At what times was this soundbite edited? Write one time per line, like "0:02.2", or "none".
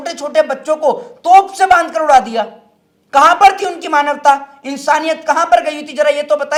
none